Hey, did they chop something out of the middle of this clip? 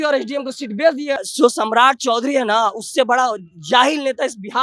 yes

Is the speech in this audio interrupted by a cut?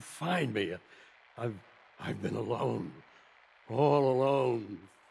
no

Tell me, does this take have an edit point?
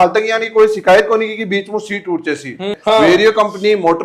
yes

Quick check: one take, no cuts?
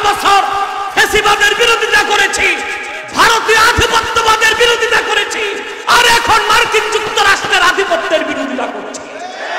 yes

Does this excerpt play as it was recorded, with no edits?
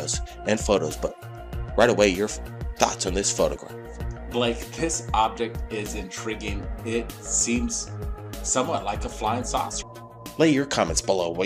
yes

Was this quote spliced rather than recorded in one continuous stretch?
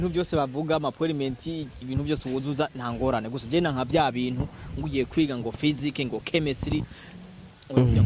no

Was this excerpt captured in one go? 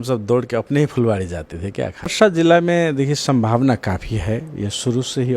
no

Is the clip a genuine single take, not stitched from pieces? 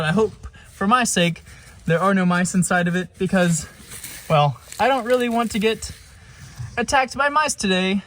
yes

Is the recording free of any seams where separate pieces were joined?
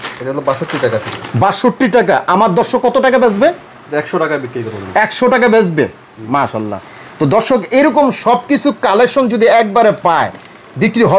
yes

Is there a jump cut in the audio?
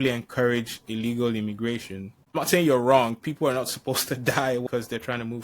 yes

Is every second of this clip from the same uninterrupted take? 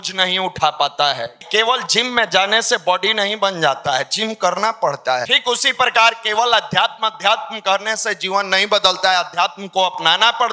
no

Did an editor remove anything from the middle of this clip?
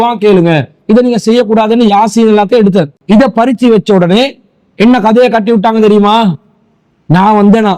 yes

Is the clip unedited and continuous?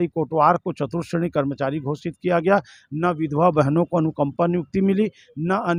yes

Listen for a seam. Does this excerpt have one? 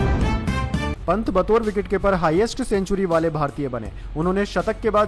no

